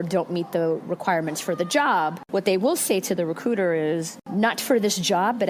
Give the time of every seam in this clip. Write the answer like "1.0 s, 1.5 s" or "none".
2.2 s, 4.2 s